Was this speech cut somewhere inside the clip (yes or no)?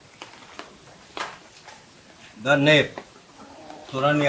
yes